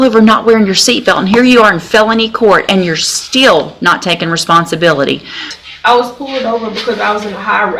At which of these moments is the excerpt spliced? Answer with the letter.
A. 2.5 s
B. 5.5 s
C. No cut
B